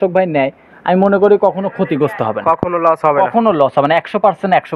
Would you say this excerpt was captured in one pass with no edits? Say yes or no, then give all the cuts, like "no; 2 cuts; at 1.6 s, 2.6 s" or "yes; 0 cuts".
yes; 0 cuts